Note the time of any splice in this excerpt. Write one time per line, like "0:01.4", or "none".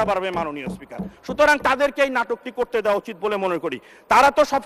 none